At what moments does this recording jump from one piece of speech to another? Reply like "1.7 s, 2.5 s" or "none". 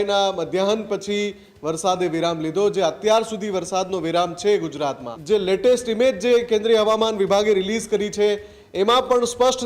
5.1 s